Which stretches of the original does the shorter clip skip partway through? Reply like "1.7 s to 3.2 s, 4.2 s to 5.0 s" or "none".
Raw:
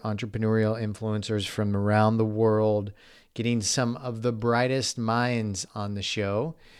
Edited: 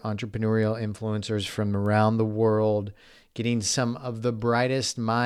none